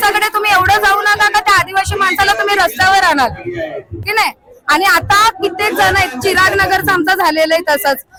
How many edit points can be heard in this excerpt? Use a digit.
0